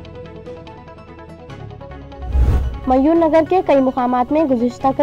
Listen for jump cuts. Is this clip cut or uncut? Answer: cut